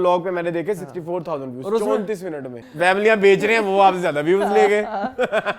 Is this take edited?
yes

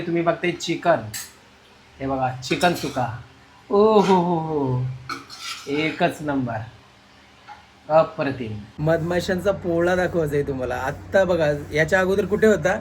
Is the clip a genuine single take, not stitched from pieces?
no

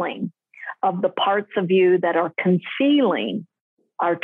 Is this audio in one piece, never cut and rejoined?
yes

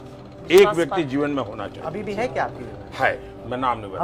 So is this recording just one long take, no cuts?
yes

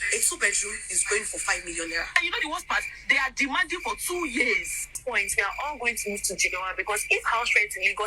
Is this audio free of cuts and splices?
no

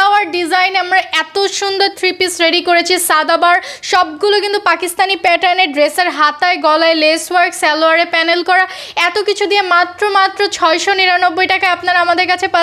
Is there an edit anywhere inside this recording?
no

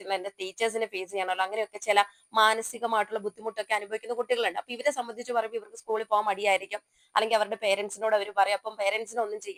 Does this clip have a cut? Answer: no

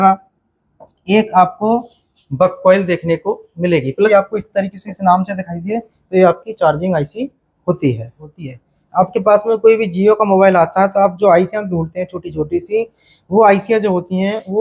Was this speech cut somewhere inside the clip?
yes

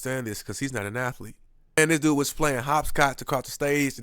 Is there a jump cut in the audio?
yes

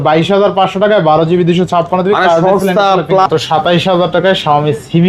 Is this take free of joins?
no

